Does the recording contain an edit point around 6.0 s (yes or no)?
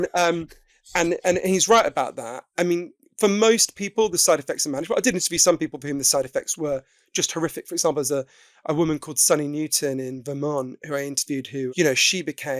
no